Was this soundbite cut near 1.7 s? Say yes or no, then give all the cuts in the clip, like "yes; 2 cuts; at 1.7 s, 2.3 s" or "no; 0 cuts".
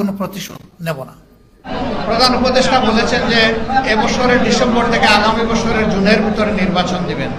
yes; 1 cut; at 1.7 s